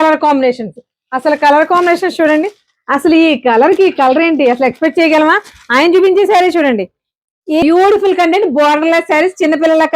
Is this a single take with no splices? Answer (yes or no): no